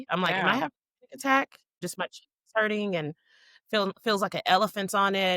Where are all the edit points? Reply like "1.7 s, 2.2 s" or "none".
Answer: 1.8 s